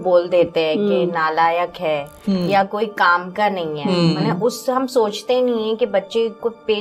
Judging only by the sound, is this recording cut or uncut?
uncut